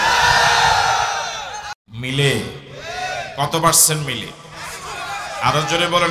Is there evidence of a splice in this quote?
yes; 1 cut; at 1.7 s

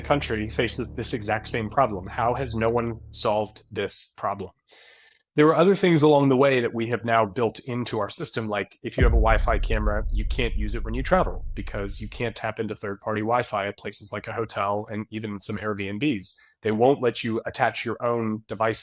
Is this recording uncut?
yes; 0 cuts

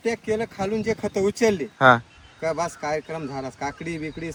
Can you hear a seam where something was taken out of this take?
no; 0 cuts

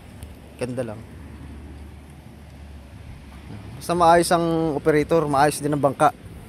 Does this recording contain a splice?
no; 0 cuts

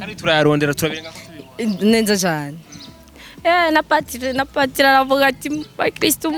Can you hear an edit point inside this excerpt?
no; 0 cuts

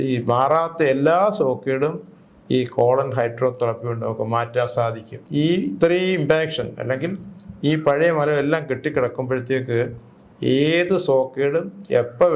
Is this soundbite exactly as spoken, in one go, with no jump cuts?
no; 1 cut; at 5.2 s

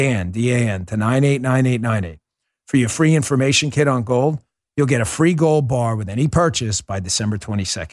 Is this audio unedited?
yes; 0 cuts

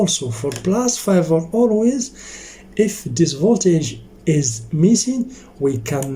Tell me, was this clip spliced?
no; 0 cuts

